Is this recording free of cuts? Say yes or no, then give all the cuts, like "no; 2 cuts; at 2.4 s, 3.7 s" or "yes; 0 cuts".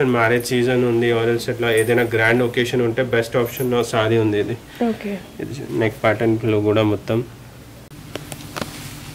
no; 1 cut; at 7.9 s